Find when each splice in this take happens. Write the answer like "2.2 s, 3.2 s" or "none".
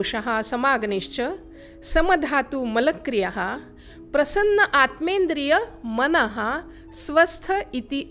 none